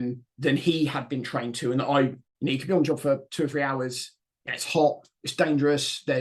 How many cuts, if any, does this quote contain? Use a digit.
1